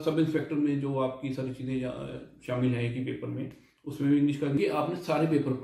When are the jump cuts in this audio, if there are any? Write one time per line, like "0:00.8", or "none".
0:04.6